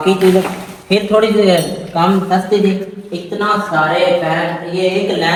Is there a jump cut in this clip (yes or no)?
no